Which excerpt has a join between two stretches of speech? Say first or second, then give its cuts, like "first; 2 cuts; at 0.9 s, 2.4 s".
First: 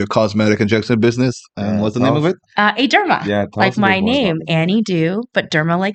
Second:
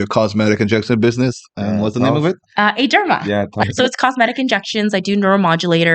second; 1 cut; at 3.6 s